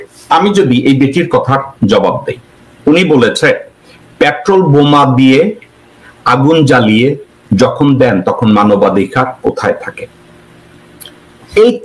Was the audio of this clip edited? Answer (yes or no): no